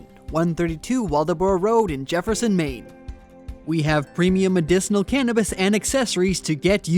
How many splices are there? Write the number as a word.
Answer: one